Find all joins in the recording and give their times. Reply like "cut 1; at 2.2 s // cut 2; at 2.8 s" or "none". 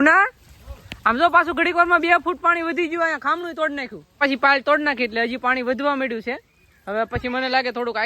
cut 1; at 4.2 s